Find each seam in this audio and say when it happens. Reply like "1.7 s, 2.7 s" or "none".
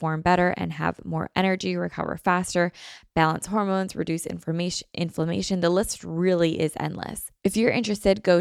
7.2 s